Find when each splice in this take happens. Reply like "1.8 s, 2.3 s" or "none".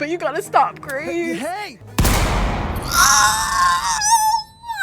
1.8 s